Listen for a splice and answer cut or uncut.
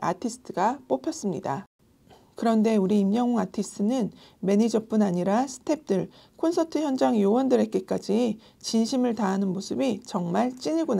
cut